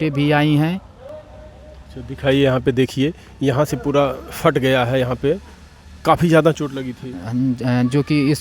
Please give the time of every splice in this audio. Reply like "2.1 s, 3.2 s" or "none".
none